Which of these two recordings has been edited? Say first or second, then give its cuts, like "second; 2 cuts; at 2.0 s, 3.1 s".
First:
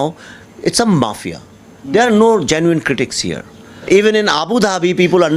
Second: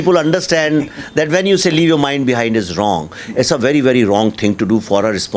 first; 1 cut; at 3.9 s